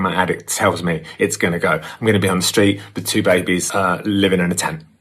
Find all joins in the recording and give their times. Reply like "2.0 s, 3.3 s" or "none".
3.7 s